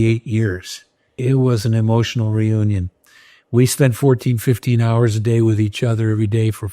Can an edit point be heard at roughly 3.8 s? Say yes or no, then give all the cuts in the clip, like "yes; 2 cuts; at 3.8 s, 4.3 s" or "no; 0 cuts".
no; 1 cut; at 1.2 s